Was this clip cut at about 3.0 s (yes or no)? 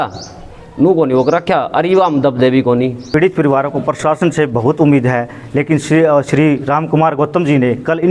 yes